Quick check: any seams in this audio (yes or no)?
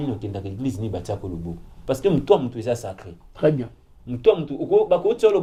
no